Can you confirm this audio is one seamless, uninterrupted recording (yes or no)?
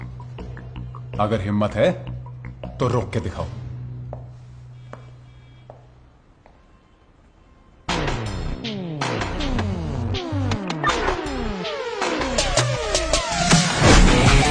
no